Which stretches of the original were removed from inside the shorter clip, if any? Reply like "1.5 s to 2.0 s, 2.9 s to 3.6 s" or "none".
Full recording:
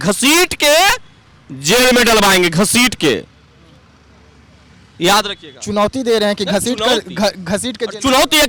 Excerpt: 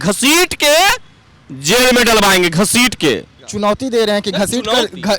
3.4 s to 5.5 s